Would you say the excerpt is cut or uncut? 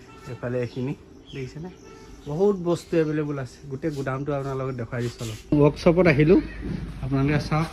cut